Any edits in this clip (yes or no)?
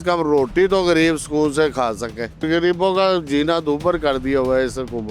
yes